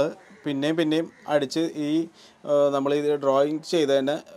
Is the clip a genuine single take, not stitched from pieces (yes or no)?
yes